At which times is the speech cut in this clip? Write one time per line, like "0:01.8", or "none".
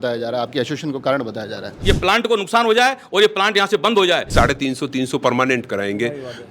0:01.8
0:04.3